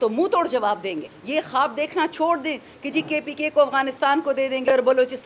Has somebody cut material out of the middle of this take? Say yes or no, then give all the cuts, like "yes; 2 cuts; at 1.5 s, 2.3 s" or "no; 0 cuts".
yes; 1 cut; at 1.1 s